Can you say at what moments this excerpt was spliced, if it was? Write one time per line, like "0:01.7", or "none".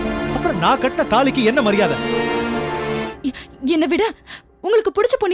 0:03.1